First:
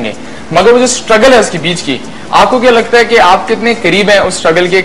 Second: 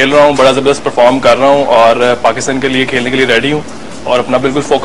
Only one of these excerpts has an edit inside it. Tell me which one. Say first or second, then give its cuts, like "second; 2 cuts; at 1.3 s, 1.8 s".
first; 1 cut; at 3.9 s